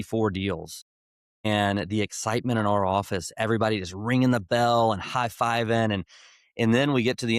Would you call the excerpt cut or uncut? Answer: uncut